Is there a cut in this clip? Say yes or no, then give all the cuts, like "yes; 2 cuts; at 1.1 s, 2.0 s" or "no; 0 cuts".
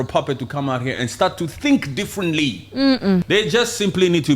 yes; 1 cut; at 3.2 s